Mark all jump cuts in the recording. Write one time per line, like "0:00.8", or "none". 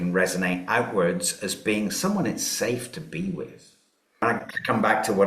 0:04.2